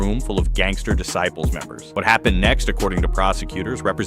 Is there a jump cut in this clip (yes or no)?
yes